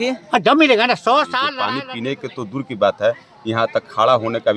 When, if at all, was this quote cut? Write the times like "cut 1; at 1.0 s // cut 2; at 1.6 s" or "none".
cut 1; at 1.5 s